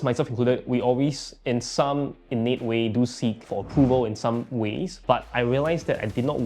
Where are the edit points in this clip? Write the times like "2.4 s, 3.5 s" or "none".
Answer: 3.4 s, 4.9 s